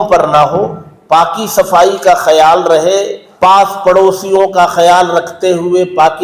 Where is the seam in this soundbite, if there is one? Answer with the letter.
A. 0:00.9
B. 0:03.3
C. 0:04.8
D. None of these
B